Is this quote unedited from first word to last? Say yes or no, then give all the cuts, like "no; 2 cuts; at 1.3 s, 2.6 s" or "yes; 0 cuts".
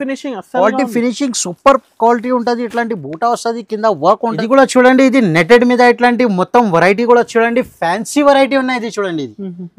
no; 1 cut; at 4.3 s